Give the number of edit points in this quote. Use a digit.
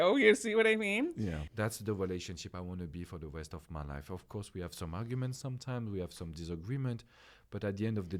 1